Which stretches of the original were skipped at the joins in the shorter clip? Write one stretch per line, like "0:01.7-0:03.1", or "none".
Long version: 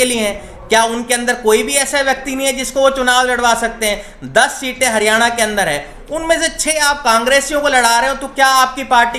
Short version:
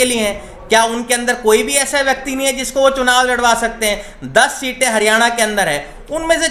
none